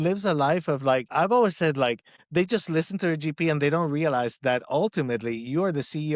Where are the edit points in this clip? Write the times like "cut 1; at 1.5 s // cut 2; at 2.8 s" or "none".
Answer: cut 1; at 1.1 s // cut 2; at 2.1 s